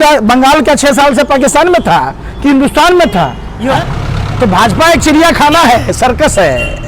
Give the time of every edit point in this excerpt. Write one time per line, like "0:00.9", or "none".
0:03.8